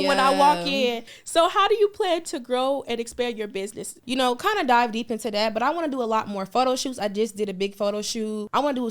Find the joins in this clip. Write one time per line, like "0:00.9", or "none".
0:01.0
0:04.0